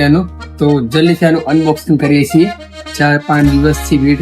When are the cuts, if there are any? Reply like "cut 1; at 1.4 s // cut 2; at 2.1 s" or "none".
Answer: cut 1; at 2.7 s